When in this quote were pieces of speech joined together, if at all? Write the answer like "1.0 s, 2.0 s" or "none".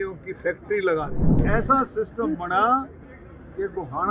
1.4 s